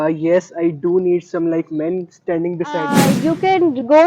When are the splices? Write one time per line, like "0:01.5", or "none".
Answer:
0:03.0